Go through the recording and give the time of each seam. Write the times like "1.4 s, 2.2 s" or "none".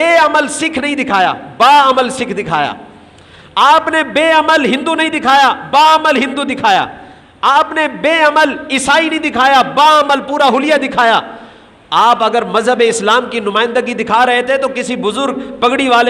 none